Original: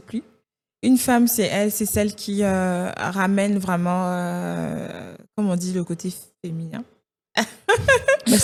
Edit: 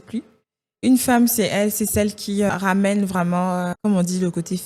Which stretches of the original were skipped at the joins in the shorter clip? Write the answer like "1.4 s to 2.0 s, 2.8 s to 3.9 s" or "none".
2.5 s to 3.0 s, 4.3 s to 5.3 s